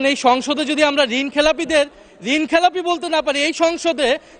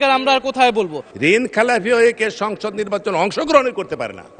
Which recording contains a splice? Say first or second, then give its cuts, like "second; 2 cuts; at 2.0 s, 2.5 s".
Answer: second; 1 cut; at 1.0 s